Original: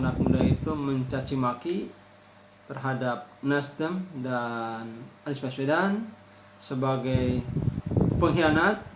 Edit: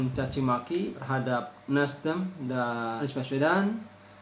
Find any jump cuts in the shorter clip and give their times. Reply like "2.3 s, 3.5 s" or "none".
1.0 s, 3.0 s